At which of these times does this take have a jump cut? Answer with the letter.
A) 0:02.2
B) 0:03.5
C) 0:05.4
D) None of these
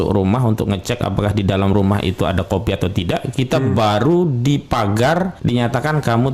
C